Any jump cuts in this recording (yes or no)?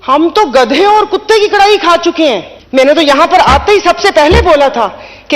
yes